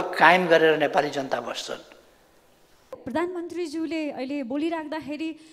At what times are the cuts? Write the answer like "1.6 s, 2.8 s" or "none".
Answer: 3.0 s